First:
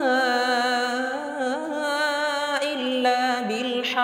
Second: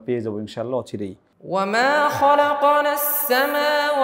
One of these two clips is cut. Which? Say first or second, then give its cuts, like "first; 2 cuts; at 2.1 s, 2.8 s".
second; 1 cut; at 1.3 s